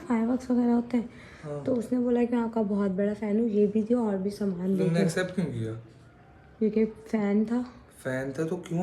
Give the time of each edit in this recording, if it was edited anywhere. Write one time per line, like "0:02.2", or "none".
none